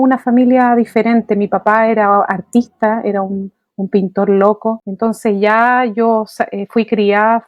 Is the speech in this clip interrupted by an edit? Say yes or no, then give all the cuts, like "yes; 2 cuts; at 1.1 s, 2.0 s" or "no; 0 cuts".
no; 0 cuts